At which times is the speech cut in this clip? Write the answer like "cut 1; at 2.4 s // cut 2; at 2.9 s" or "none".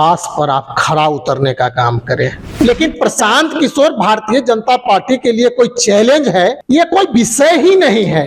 cut 1; at 2.6 s // cut 2; at 6.6 s